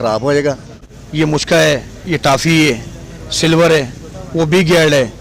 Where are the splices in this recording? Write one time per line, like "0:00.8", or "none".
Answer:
0:01.0